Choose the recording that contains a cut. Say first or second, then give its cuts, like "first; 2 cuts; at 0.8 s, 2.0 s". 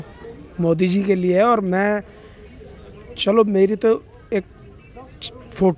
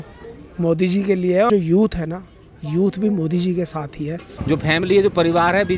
second; 2 cuts; at 1.5 s, 4.3 s